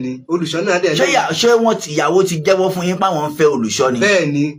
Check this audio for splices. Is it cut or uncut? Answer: uncut